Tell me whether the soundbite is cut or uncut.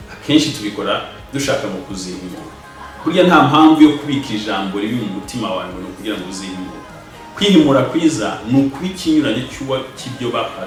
uncut